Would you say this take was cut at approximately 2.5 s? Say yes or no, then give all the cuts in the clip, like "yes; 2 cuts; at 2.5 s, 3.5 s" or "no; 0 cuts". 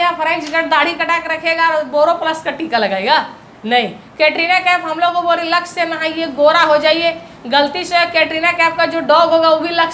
no; 0 cuts